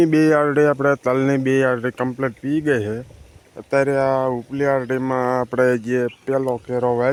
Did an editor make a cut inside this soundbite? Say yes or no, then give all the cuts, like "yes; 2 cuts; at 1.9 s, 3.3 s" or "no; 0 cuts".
no; 0 cuts